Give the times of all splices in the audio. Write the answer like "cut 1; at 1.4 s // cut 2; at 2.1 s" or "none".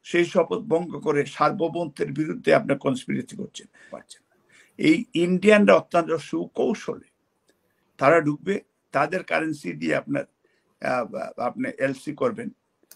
cut 1; at 3.9 s